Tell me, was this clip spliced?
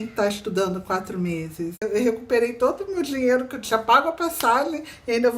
yes; 1 cut; at 1.8 s

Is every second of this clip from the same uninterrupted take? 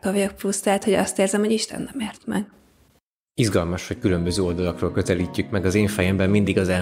yes; 0 cuts

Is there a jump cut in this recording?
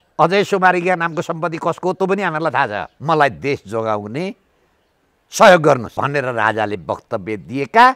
yes; 2 cuts; at 2.9 s, 5.9 s

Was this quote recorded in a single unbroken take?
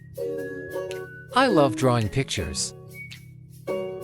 no; 1 cut; at 2.5 s

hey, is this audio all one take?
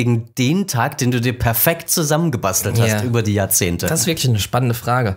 yes; 0 cuts

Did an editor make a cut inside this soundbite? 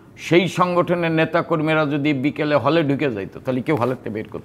no; 0 cuts

